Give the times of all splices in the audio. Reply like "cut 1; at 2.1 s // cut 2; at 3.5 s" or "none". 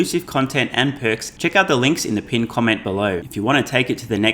cut 1; at 1.3 s // cut 2; at 3.2 s